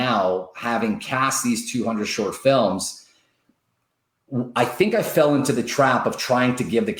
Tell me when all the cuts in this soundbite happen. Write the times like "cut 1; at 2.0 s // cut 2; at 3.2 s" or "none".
none